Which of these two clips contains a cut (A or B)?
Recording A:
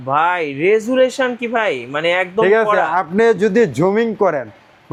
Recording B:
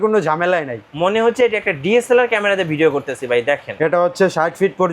B